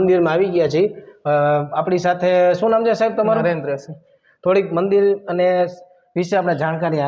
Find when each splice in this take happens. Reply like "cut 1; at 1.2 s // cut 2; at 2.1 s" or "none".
none